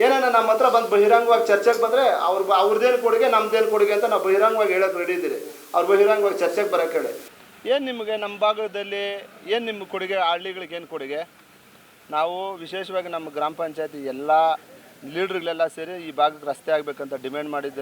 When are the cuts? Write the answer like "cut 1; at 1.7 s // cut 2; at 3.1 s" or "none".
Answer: cut 1; at 7.3 s